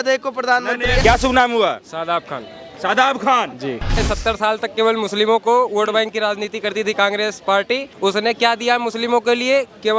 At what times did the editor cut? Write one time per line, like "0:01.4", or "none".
0:04.0
0:07.9